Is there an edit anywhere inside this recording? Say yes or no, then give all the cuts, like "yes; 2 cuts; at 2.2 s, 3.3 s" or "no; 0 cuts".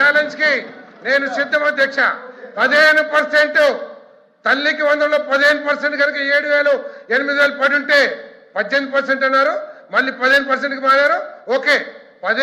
no; 0 cuts